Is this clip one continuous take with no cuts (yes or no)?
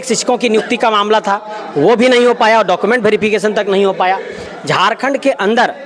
yes